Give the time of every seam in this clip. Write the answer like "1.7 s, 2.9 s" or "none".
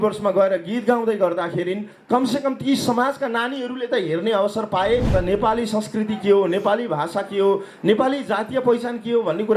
5.1 s